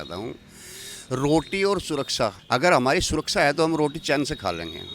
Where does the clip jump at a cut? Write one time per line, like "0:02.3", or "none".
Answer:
0:02.4